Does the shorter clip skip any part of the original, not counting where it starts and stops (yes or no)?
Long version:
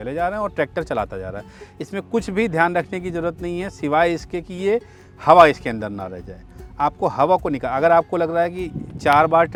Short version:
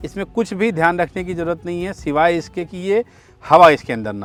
no